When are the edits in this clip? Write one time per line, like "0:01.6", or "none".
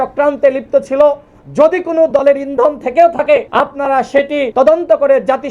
0:03.5
0:04.5